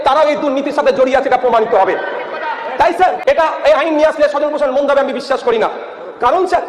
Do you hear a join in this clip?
yes; 1 cut; at 3.2 s

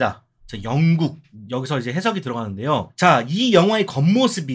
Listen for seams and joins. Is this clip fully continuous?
yes; 0 cuts

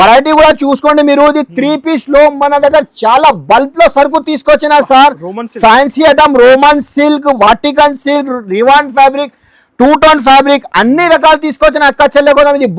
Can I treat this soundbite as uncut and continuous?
yes; 0 cuts

